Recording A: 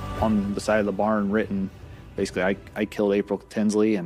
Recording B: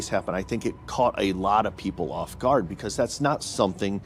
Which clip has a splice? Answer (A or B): B